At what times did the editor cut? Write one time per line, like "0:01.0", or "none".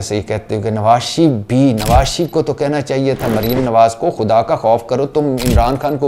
none